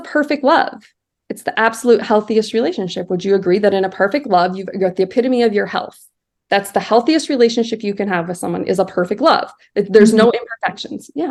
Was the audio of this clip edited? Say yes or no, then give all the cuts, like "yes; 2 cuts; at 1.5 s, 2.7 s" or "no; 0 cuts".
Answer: no; 0 cuts